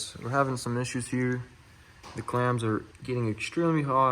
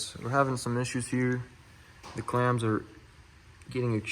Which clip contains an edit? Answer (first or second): first